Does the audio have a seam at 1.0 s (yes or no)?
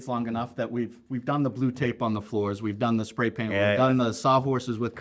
no